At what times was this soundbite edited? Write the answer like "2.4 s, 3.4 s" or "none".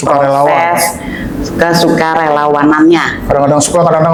none